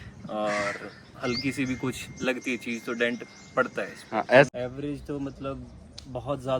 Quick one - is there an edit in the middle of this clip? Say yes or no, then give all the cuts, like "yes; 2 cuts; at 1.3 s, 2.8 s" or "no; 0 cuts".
yes; 1 cut; at 4.5 s